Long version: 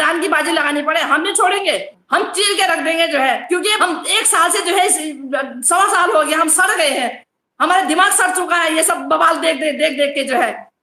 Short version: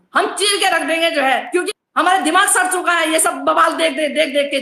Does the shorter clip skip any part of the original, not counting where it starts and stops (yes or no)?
yes